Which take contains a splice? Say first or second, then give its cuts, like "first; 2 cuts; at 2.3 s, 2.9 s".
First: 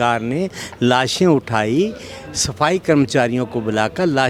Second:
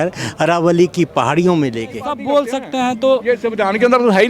second; 1 cut; at 2.1 s